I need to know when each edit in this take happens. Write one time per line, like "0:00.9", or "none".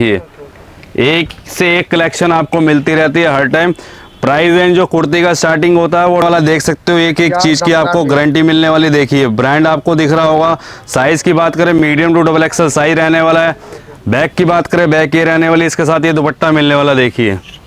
0:06.2